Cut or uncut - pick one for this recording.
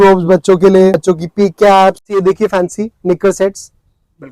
cut